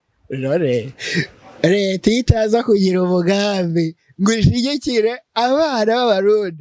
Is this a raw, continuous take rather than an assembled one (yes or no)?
yes